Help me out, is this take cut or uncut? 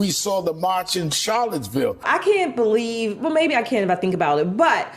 cut